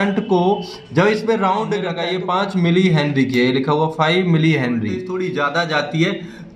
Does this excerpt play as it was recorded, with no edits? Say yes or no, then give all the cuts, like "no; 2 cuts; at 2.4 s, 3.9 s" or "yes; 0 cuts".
no; 2 cuts; at 2.0 s, 5.1 s